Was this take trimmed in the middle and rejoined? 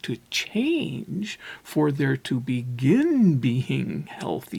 no; 0 cuts

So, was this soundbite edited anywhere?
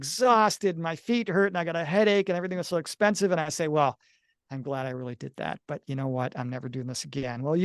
no; 0 cuts

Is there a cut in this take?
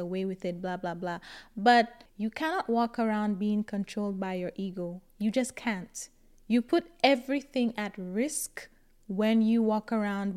yes; 1 cut; at 2.0 s

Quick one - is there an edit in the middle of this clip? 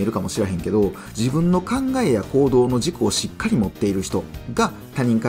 yes; 1 cut; at 1.1 s

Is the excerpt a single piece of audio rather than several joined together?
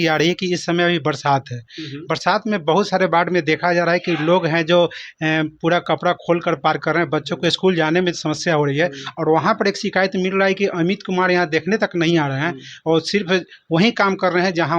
yes; 0 cuts

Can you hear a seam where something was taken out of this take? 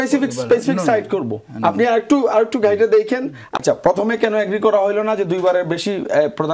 yes; 1 cut; at 3.5 s

